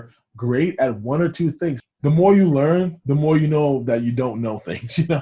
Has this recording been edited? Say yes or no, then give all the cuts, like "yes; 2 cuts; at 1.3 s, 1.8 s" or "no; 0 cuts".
yes; 1 cut; at 1.8 s